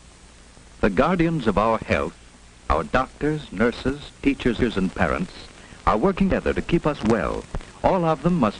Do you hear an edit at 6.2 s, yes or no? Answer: yes